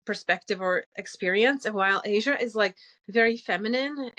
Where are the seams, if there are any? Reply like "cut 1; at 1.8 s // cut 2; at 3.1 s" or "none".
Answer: none